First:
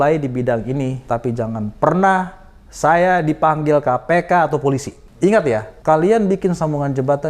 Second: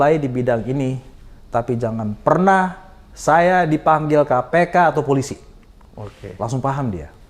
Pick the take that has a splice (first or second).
first